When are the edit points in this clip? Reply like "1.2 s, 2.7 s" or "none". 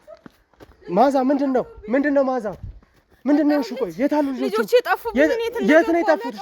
none